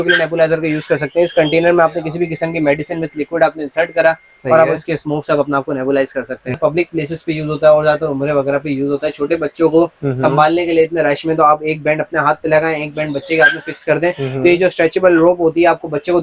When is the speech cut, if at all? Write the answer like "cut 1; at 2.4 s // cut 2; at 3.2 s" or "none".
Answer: cut 1; at 6.5 s